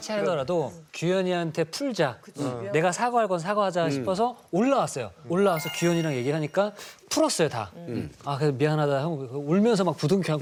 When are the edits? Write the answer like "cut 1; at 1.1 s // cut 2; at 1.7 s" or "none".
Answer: none

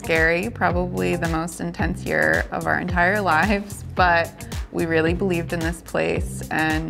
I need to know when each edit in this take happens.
none

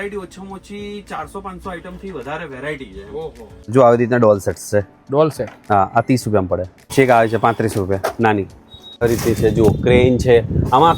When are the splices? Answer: cut 1; at 3.7 s // cut 2; at 6.9 s // cut 3; at 9.0 s

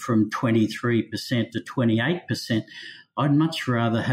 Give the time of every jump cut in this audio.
none

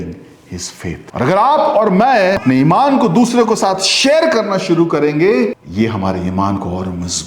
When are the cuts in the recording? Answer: cut 1; at 1.0 s // cut 2; at 2.4 s // cut 3; at 5.6 s

